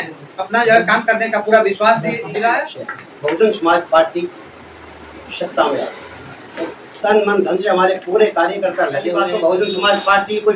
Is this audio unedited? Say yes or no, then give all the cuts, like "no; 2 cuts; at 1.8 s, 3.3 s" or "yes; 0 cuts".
no; 2 cuts; at 2.8 s, 9.2 s